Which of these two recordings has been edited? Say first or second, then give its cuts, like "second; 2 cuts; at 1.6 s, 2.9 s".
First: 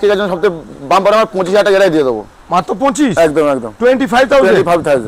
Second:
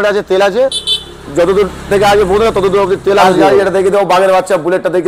second; 1 cut; at 3.3 s